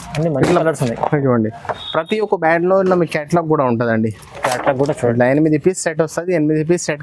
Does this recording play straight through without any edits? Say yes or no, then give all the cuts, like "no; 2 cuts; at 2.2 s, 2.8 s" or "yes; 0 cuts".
yes; 0 cuts